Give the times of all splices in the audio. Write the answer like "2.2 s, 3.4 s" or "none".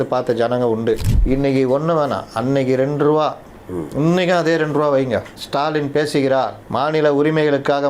1.1 s, 5.4 s, 6.6 s